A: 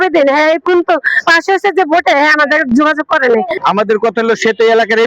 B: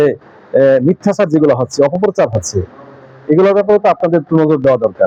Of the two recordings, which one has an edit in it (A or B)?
A